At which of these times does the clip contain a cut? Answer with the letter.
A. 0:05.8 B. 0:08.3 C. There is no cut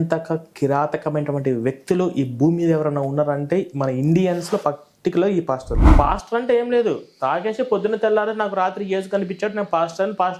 A